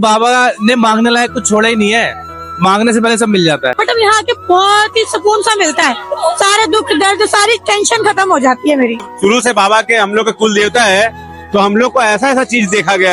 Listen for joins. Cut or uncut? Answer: cut